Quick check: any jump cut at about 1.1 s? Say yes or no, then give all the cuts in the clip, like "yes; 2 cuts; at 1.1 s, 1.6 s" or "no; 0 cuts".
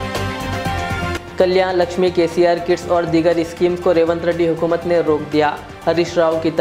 yes; 1 cut; at 1.1 s